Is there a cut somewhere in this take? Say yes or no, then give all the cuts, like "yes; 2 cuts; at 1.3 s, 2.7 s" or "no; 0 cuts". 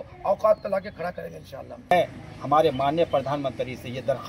yes; 1 cut; at 1.9 s